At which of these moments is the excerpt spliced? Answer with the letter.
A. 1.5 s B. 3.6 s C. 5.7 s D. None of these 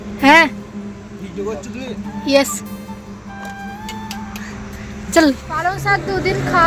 C